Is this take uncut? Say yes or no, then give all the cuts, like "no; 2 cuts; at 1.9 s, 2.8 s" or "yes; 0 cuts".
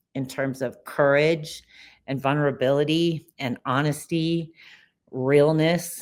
yes; 0 cuts